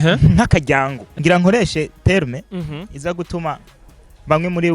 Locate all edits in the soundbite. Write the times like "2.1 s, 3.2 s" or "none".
1.0 s